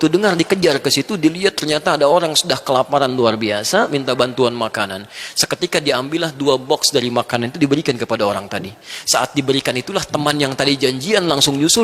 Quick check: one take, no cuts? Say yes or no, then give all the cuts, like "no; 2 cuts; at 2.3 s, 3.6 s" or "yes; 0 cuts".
yes; 0 cuts